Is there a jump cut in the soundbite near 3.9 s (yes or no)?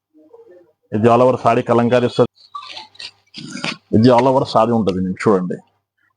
no